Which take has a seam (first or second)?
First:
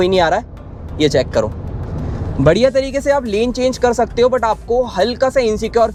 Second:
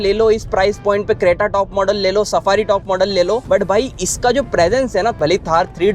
second